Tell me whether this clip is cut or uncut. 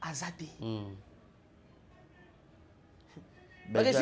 uncut